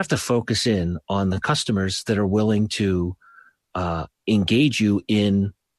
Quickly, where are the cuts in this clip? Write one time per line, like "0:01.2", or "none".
none